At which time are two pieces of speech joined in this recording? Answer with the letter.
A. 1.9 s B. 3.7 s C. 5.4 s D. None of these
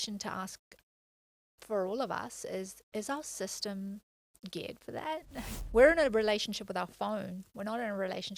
C